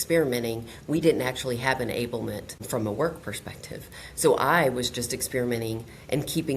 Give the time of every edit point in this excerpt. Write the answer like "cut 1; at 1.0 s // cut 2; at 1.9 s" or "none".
cut 1; at 2.5 s